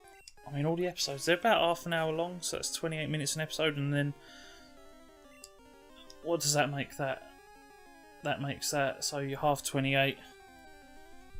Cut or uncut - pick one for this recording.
uncut